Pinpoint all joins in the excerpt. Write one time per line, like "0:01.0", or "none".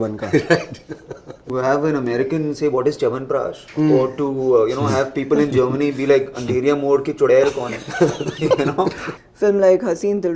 0:01.4
0:09.1